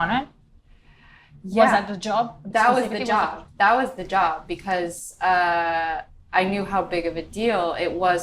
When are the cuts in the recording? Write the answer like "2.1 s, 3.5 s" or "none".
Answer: none